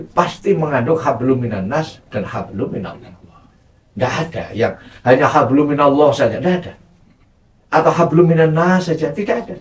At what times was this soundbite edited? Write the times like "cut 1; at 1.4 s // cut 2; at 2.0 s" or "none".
none